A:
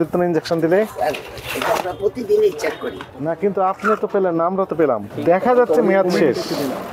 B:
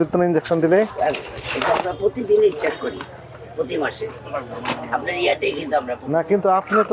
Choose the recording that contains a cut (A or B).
A